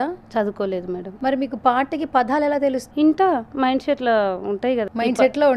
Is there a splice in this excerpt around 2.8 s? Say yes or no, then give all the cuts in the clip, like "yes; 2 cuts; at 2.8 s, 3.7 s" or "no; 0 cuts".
yes; 3 cuts; at 1.1 s, 2.8 s, 4.9 s